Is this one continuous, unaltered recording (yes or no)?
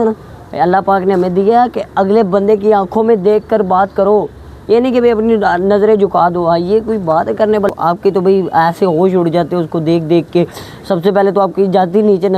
no